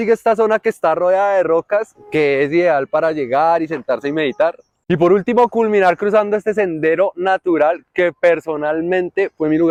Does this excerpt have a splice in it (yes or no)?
no